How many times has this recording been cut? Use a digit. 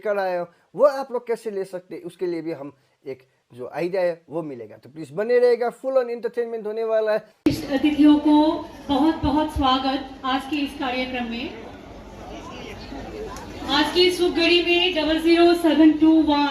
1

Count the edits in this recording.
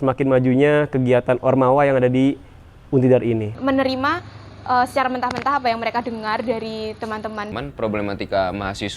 2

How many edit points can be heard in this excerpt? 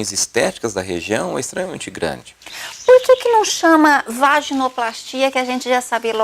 1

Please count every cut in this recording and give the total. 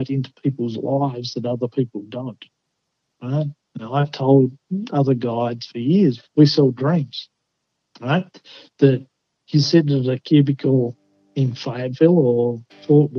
1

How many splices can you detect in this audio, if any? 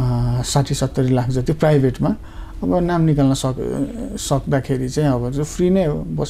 0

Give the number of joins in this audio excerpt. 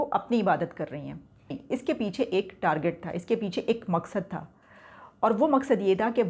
1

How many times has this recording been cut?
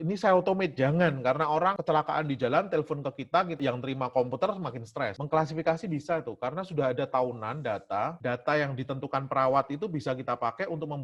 2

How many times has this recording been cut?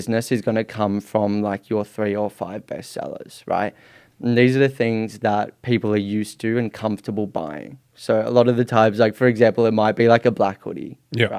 0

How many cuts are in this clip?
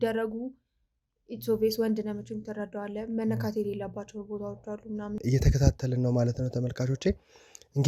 1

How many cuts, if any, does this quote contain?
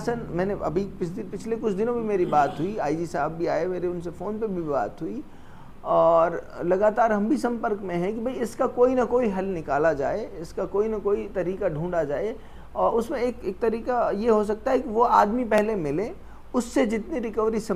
0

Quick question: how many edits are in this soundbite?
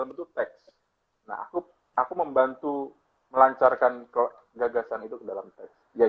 0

